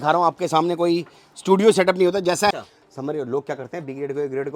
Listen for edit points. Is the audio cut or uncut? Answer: cut